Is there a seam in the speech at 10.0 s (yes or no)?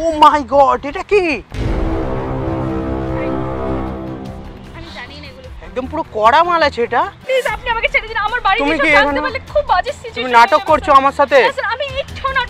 no